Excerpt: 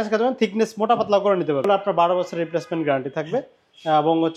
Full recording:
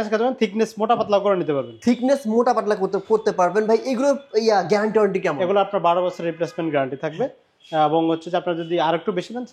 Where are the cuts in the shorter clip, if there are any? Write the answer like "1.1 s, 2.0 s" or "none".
1.6 s